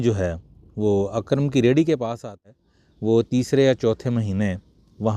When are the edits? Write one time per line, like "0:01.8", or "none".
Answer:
0:02.4